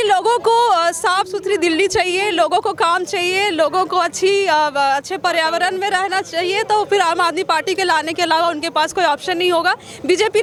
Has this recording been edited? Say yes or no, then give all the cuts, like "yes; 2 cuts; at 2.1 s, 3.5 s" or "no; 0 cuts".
no; 0 cuts